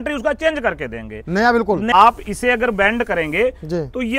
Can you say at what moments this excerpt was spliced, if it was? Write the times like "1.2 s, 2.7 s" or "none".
1.9 s

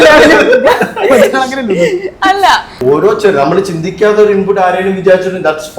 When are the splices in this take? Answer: 2.7 s

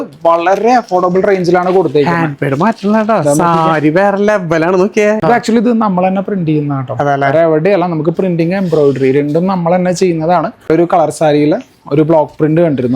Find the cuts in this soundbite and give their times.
5.2 s, 10.7 s

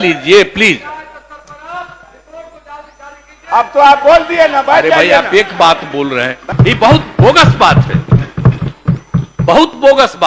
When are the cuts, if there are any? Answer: 6.5 s

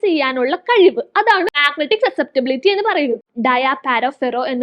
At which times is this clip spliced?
1.7 s, 3.3 s

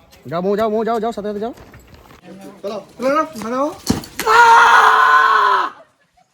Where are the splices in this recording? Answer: 2.3 s

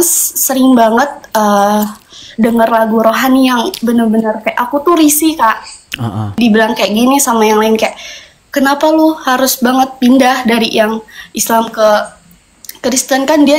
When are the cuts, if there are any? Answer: 6.4 s

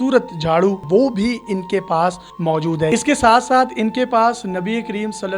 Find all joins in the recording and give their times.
0.8 s, 2.9 s

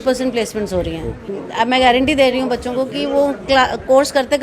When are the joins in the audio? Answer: 1.4 s

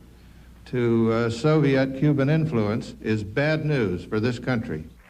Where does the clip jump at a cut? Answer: 3.5 s

